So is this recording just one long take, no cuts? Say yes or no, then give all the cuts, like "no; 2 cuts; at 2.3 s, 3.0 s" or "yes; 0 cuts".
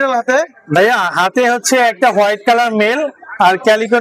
yes; 0 cuts